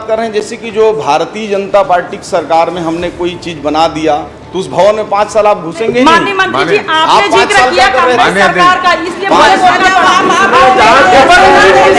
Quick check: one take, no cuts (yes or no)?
yes